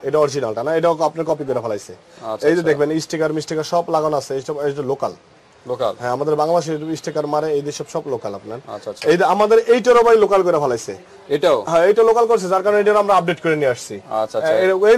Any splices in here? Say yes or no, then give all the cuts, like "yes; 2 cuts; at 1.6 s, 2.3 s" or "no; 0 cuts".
no; 0 cuts